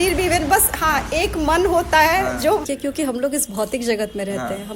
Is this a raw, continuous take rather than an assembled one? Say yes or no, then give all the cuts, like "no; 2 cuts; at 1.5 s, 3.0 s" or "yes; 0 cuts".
no; 1 cut; at 2.4 s